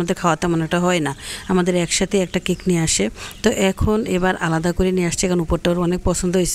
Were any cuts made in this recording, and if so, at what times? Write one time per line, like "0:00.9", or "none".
none